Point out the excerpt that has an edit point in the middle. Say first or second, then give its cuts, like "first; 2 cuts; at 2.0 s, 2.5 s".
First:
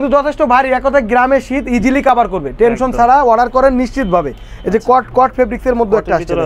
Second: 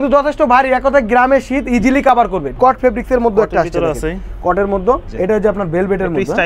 second; 2 cuts; at 2.5 s, 5.1 s